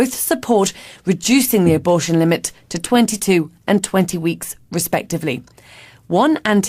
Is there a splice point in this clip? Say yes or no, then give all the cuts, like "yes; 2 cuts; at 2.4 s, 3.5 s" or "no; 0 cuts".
yes; 1 cut; at 2.5 s